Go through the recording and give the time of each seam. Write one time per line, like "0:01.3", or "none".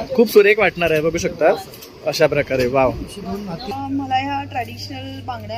0:03.7